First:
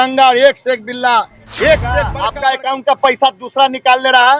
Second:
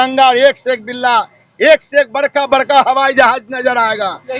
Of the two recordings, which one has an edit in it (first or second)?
first